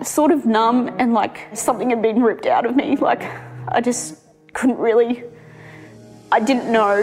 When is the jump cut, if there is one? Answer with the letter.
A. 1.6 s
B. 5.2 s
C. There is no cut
A